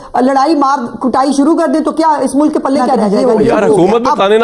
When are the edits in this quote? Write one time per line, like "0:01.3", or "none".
0:03.1